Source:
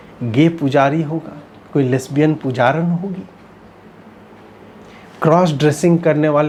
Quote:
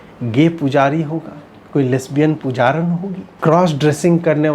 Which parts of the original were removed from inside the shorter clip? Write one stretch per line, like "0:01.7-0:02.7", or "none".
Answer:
0:03.2-0:05.0